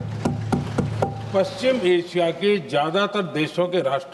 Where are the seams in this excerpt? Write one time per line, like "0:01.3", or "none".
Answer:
none